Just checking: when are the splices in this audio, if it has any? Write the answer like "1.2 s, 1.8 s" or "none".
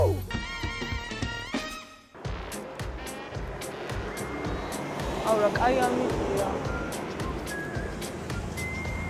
3.7 s